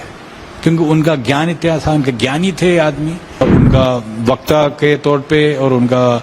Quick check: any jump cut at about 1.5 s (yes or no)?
no